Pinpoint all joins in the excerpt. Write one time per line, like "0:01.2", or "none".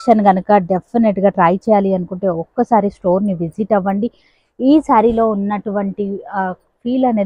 none

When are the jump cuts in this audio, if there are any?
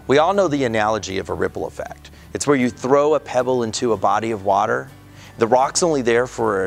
none

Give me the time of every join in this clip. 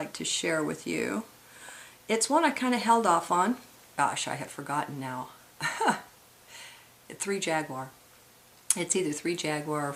none

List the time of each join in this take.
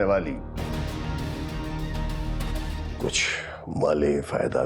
0:02.9

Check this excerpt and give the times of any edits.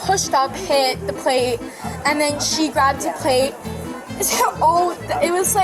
none

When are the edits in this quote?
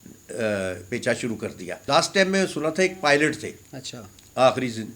0:01.7

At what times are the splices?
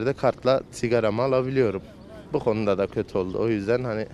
none

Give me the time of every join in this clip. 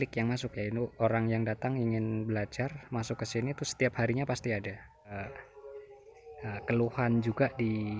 0:05.1

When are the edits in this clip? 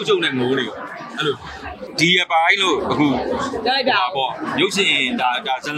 0:01.9

